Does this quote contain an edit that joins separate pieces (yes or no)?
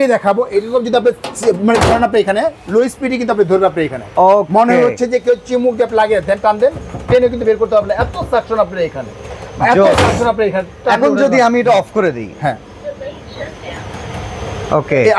no